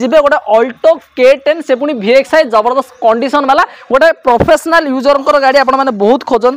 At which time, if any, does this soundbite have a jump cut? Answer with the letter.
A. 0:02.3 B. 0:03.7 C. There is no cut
C